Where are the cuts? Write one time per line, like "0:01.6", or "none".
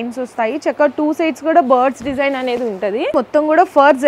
0:03.1